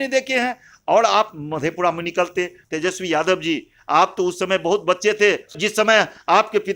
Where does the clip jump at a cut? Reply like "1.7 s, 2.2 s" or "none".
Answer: 2.6 s, 5.5 s